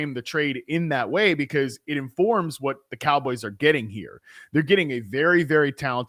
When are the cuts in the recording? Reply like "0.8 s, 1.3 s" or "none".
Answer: none